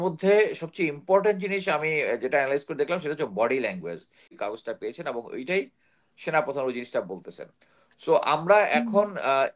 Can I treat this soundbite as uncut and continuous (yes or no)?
no